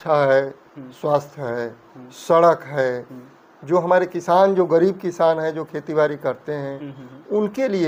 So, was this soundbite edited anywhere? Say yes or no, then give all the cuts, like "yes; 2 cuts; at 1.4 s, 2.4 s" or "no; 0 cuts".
no; 0 cuts